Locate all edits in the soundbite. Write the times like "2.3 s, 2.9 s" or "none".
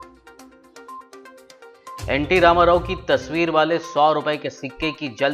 2.0 s